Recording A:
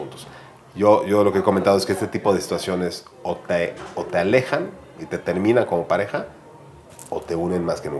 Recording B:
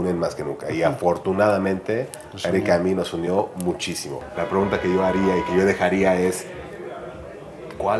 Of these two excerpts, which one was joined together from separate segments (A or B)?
B